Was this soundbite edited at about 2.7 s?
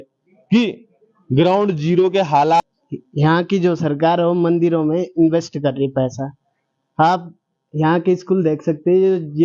yes; 1 cut; at 2.7 s

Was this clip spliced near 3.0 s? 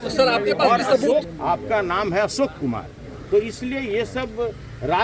no; 1 cut; at 1.3 s

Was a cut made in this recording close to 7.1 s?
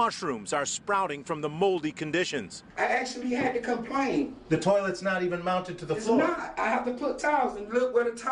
yes; 1 cut; at 7.1 s

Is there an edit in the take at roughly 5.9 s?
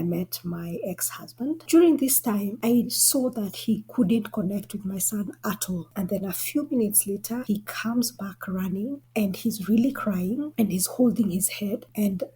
yes; 3 cuts; at 1.6 s, 5.9 s, 7.4 s

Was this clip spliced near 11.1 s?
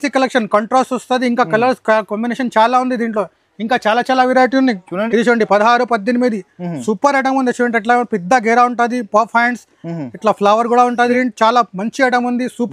yes; 2 cuts; at 5.0 s, 11.1 s

